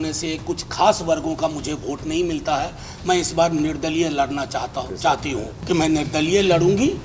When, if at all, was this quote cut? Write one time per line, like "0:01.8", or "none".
0:05.5